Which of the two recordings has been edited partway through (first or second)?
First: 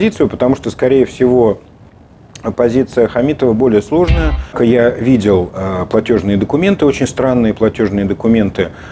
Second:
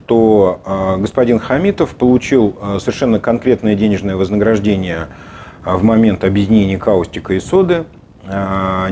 first